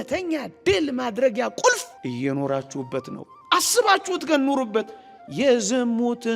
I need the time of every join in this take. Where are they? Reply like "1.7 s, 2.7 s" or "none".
1.9 s